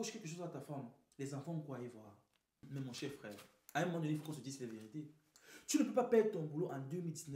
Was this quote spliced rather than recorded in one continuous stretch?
yes; 1 cut; at 2.5 s

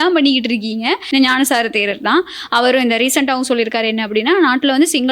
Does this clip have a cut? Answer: yes; 1 cut; at 1.0 s

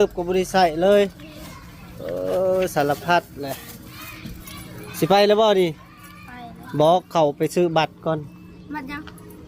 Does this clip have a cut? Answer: no; 0 cuts

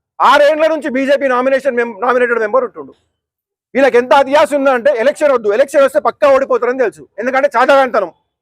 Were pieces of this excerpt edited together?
no; 0 cuts

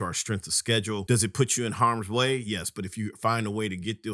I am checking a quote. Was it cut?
yes; 1 cut; at 1.0 s

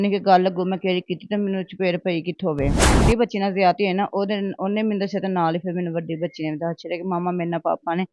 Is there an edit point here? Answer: yes; 1 cut; at 3.0 s

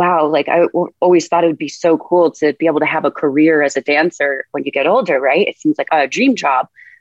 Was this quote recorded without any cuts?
no; 1 cut; at 5.9 s

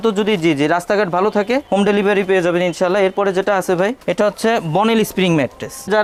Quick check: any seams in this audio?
no; 0 cuts

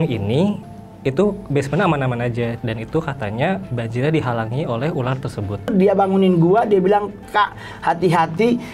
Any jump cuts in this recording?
yes; 3 cuts; at 2.6 s, 3.7 s, 5.7 s

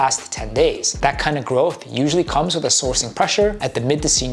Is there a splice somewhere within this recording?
no; 0 cuts

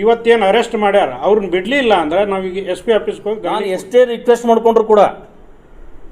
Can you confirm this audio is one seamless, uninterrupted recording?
no; 1 cut; at 3.8 s

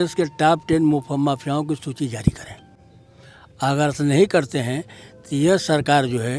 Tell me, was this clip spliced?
no; 0 cuts

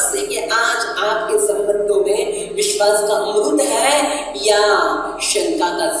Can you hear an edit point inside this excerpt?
no; 0 cuts

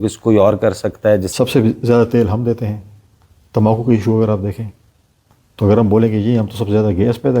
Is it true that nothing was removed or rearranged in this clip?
no; 1 cut; at 1.3 s

